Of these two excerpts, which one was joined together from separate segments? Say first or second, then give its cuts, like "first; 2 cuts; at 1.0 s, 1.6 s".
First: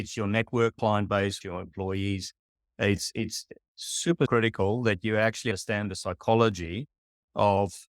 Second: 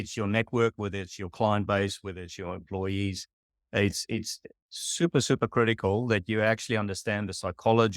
first; 4 cuts; at 0.8 s, 1.4 s, 4.3 s, 5.6 s